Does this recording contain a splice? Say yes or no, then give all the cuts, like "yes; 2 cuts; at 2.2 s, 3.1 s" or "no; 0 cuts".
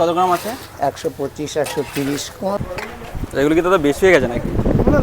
yes; 1 cut; at 2.5 s